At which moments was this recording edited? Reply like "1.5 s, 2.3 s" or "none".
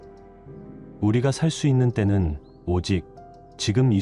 1.0 s